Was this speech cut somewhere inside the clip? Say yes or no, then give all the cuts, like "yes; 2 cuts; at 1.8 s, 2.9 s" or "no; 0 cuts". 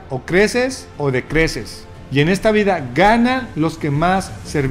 no; 0 cuts